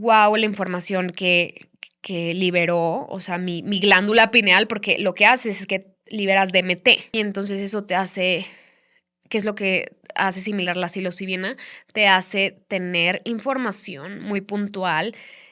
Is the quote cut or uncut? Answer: cut